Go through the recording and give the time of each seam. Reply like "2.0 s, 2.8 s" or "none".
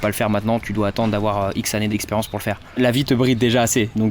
2.8 s

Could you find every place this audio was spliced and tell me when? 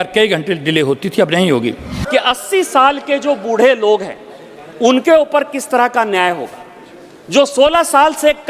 1.9 s

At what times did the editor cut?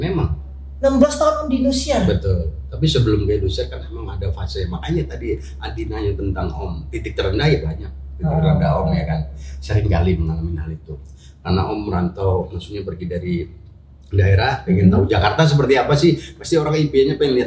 none

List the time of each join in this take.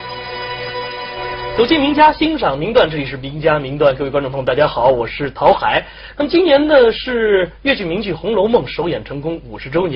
1.1 s

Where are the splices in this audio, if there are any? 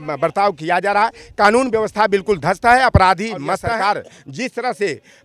3.5 s

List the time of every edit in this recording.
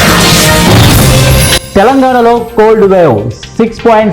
1.5 s

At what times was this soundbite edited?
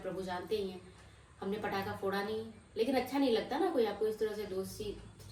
none

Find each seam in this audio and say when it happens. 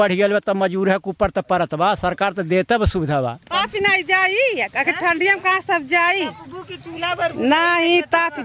3.4 s

